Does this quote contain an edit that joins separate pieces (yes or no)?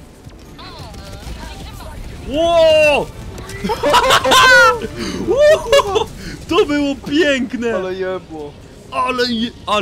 no